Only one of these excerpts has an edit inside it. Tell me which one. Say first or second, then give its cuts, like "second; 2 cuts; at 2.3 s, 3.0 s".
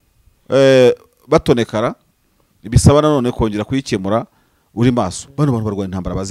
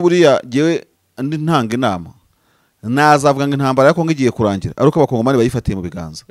first; 1 cut; at 5.2 s